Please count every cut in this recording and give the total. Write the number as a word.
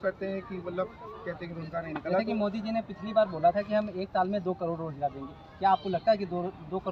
zero